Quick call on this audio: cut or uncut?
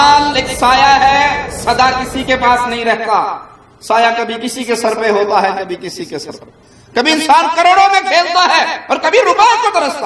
uncut